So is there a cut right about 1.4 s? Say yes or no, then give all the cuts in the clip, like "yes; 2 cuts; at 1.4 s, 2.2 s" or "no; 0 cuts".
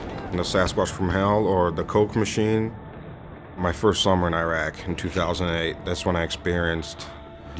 no; 1 cut; at 6.4 s